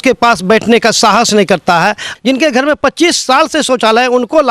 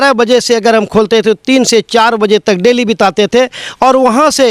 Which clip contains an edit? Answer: first; 1 cut; at 2.1 s

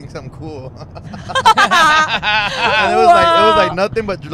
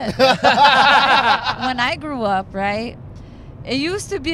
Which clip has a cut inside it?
second; 1 cut; at 1.6 s

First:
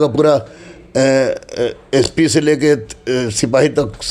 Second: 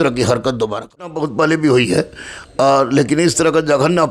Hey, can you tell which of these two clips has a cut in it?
second; 1 cut; at 1.1 s

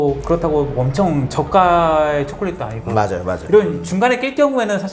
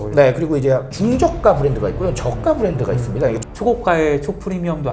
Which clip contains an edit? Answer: second; 1 cut; at 3.4 s

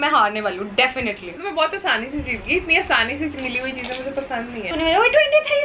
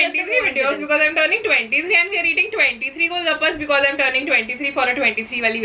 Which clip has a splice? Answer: first; 2 cuts; at 1.4 s, 4.7 s

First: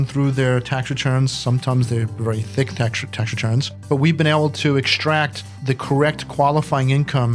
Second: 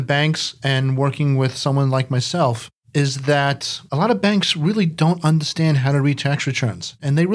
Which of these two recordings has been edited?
second; 1 cut; at 3.7 s

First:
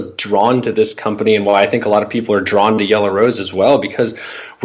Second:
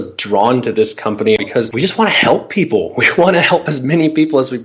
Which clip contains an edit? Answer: second; 1 cut; at 1.5 s

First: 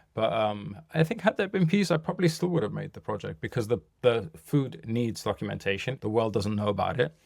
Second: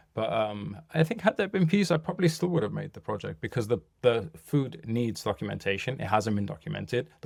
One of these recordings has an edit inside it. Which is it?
first; 1 cut; at 5.9 s

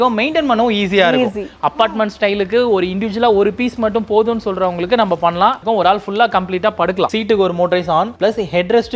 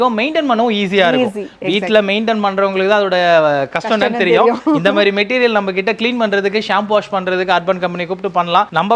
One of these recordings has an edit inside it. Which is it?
first; 3 cuts; at 1.5 s, 5.6 s, 7.1 s

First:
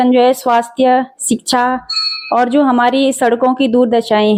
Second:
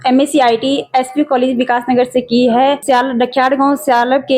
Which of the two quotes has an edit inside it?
second; 1 cut; at 2.8 s

